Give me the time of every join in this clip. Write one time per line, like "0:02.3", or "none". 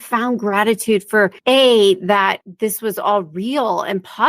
0:01.4
0:02.5